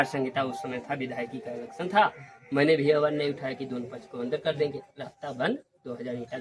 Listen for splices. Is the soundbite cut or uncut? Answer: uncut